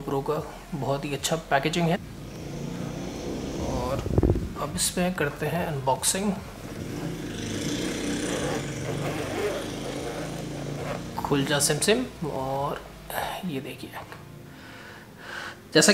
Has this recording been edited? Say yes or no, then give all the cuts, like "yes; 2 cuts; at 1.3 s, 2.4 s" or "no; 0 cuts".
yes; 1 cut; at 2.0 s